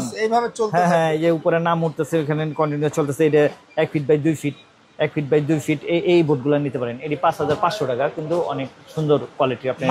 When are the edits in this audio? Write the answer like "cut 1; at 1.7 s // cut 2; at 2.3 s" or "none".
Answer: none